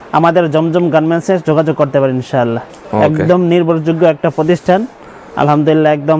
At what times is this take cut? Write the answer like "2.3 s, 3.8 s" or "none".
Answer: none